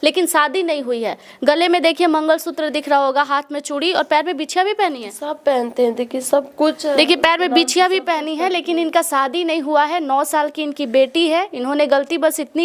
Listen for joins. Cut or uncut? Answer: uncut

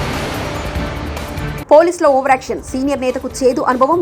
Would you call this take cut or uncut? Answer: cut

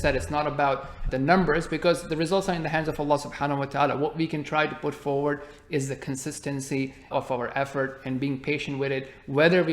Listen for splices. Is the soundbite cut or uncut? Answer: cut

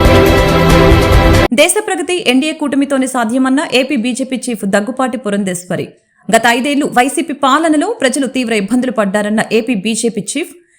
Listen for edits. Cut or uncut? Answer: cut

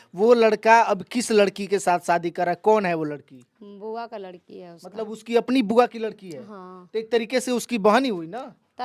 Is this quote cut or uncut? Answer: uncut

